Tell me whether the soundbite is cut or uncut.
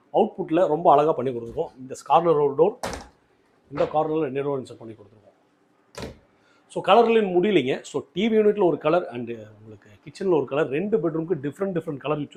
uncut